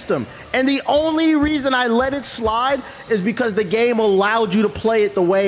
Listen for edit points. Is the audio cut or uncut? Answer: uncut